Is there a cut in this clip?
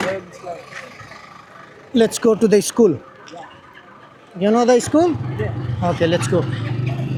no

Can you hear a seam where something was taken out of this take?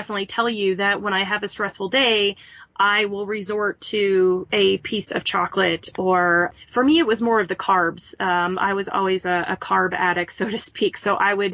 yes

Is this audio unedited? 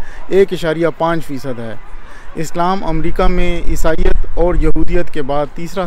yes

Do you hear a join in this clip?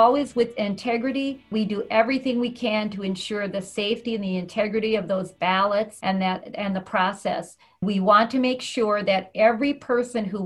yes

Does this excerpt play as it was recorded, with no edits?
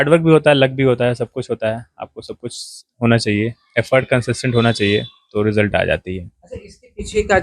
yes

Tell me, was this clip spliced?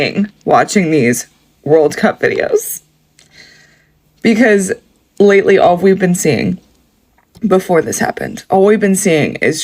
no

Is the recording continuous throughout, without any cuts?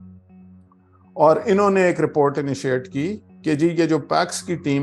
yes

